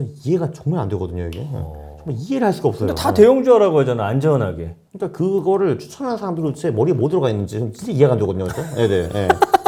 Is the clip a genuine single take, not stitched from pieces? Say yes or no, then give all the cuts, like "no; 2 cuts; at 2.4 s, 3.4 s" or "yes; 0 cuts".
yes; 0 cuts